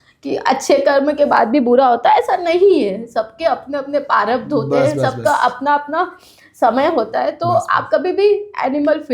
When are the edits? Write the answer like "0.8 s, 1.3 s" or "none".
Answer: none